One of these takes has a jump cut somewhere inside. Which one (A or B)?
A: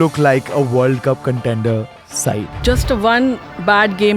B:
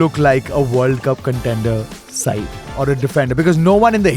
A